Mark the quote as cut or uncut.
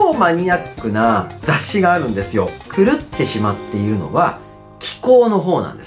cut